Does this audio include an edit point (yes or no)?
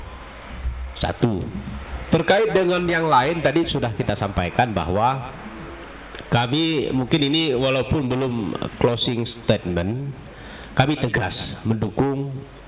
no